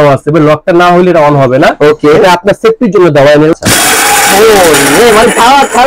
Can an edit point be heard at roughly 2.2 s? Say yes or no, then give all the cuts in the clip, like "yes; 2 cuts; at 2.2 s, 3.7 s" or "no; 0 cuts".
no; 1 cut; at 3.5 s